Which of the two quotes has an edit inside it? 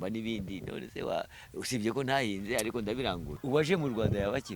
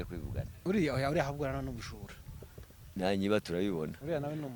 first; 1 cut; at 3.3 s

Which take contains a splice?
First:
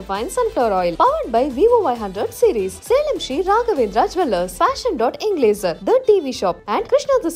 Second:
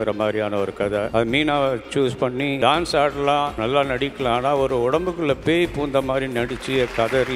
second; 3 cuts; at 1.1 s, 2.6 s, 3.5 s

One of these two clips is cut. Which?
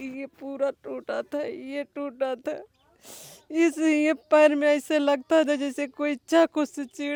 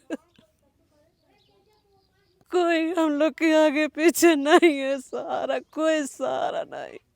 second; 1 cut; at 2.4 s

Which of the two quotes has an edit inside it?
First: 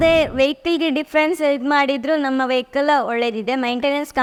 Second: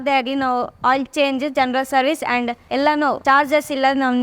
second; 1 cut; at 2.8 s

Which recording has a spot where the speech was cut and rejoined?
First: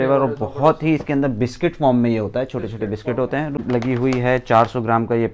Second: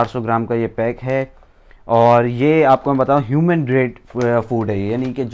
first; 1 cut; at 3.6 s

